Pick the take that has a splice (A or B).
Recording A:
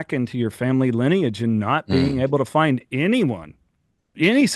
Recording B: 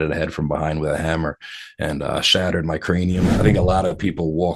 B